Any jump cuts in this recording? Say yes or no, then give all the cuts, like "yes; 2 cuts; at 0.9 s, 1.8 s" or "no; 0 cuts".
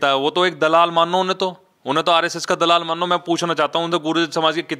no; 0 cuts